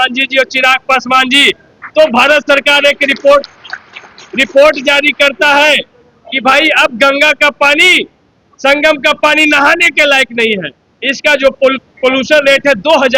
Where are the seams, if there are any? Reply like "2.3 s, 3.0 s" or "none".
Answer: none